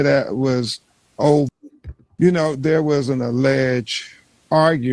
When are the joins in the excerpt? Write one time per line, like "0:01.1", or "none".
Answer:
0:01.8